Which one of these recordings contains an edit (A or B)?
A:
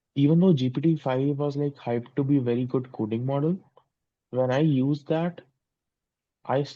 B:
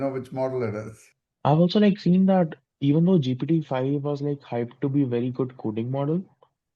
B